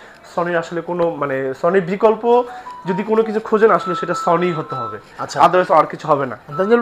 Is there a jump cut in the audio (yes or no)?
no